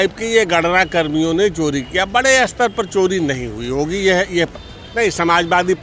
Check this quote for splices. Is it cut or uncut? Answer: cut